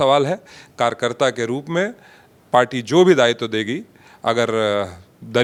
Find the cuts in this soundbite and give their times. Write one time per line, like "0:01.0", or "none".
none